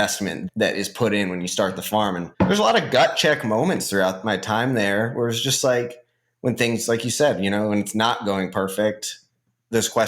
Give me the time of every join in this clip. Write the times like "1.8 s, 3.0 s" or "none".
2.2 s